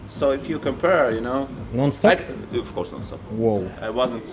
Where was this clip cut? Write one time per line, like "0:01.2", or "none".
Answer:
0:03.3